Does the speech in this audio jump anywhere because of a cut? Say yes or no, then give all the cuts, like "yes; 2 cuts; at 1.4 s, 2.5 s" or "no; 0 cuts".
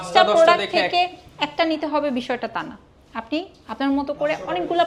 no; 0 cuts